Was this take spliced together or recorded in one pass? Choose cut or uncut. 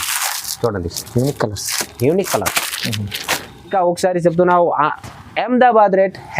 cut